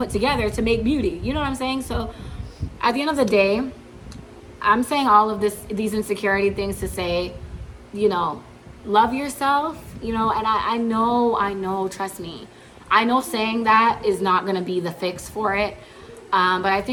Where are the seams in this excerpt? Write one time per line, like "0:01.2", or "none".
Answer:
none